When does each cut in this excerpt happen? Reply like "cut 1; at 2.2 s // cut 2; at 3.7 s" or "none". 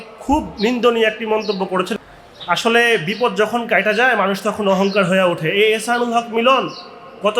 cut 1; at 1.9 s